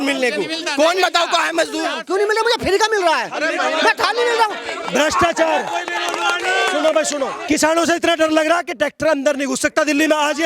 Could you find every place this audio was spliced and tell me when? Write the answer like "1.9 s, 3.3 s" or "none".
2.0 s, 7.3 s